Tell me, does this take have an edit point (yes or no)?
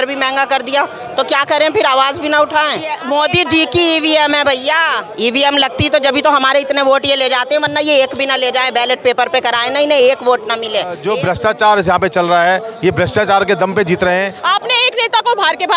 yes